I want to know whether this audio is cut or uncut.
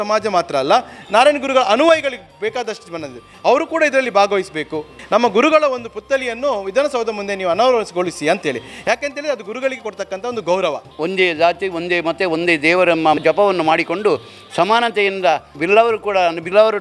cut